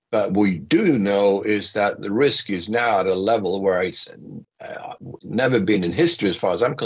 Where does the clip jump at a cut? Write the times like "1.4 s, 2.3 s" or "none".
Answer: none